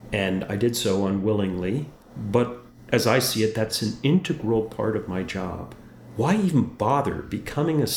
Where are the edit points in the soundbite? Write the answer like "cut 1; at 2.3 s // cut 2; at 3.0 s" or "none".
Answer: cut 1; at 3.8 s

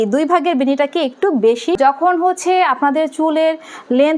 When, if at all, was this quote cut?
cut 1; at 1.8 s

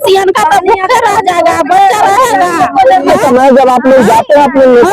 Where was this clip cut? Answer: cut 1; at 3.1 s

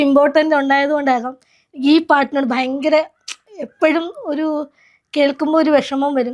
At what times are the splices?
none

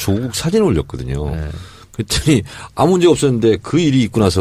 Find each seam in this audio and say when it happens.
none

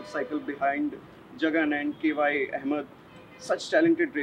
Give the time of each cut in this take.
none

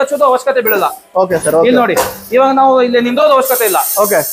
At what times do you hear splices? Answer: none

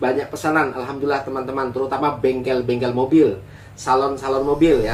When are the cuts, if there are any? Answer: none

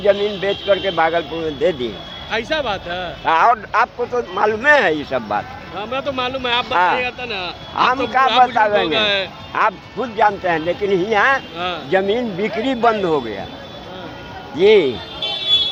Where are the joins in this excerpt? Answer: none

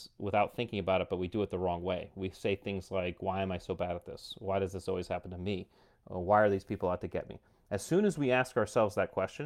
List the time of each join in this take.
none

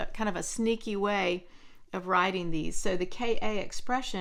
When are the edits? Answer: none

